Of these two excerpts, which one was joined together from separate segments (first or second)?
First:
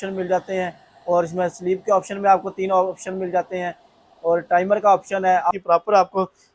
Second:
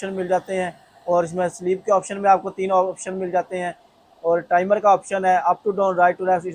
first